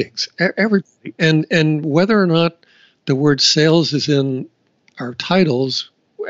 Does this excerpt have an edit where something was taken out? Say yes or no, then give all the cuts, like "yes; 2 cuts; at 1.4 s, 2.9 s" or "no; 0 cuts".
no; 0 cuts